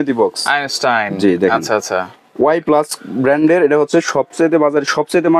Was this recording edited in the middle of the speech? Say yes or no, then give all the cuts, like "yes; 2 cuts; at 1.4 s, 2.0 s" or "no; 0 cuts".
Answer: no; 0 cuts